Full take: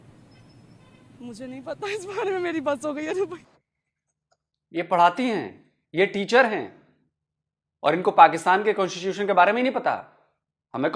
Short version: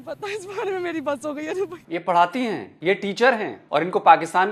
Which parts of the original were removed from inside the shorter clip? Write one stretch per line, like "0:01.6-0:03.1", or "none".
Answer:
0:03.4-0:04.6
0:05.5-0:05.8
0:06.7-0:07.7